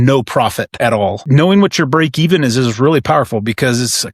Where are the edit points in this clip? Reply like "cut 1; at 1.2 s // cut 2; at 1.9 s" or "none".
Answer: cut 1; at 1.1 s